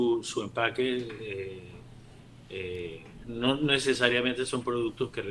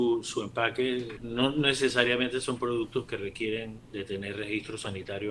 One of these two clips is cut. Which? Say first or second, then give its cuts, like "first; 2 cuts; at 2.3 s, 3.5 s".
second; 2 cuts; at 1.2 s, 3.8 s